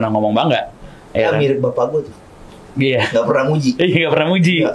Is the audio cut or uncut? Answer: uncut